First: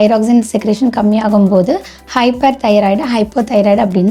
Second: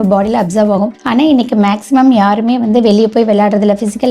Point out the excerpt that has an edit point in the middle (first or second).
second